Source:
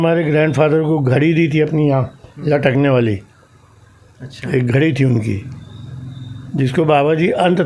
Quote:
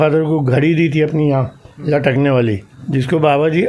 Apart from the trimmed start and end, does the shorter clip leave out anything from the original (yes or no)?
yes